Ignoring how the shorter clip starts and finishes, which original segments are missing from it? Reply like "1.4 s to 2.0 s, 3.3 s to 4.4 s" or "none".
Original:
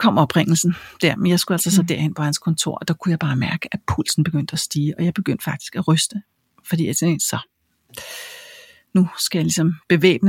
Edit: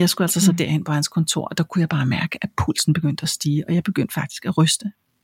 none